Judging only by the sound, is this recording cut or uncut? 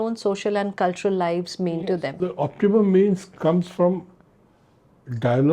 cut